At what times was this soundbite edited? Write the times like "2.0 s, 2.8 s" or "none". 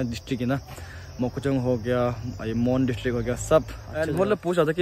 3.8 s